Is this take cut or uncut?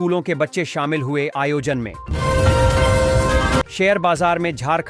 cut